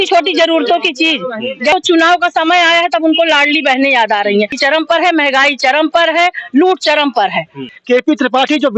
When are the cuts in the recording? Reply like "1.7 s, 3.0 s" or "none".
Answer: 1.7 s, 4.6 s, 7.7 s